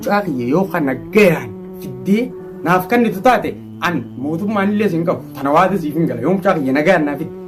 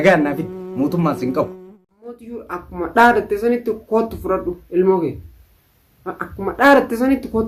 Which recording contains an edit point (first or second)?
second